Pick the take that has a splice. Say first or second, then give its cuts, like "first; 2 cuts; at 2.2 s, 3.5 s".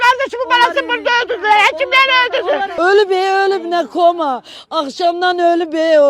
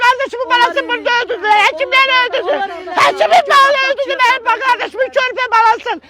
first; 1 cut; at 2.7 s